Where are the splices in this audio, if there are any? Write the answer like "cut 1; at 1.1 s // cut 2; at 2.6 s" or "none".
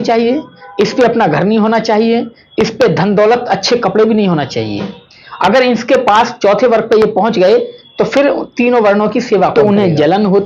cut 1; at 9.5 s